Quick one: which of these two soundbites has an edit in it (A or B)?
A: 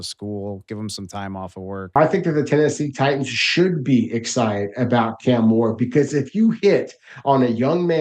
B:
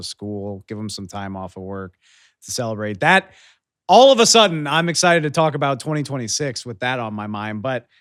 A